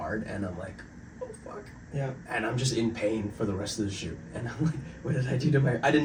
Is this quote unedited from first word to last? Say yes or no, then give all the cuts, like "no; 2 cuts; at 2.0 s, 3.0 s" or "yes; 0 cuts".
yes; 0 cuts